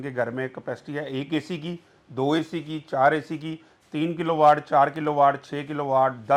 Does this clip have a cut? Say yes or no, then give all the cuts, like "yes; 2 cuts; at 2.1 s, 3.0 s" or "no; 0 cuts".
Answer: no; 0 cuts